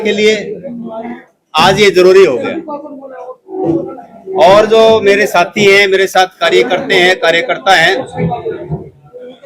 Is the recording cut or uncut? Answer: uncut